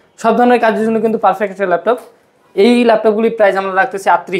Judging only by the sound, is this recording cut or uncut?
uncut